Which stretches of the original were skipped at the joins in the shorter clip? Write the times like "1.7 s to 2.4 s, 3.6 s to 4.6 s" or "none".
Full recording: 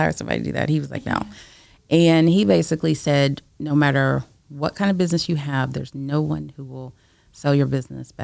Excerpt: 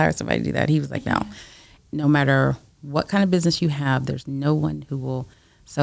1.8 s to 3.4 s